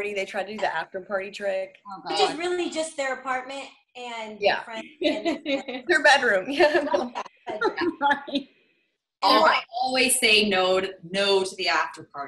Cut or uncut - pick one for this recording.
uncut